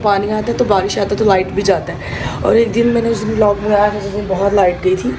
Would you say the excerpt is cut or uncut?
uncut